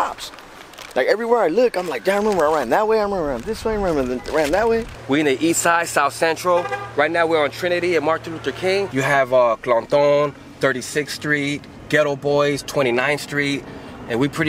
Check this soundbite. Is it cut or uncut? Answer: cut